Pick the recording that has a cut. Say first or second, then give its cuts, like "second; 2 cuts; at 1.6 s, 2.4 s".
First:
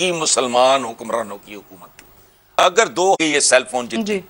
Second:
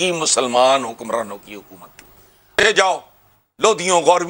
second; 1 cut; at 2.6 s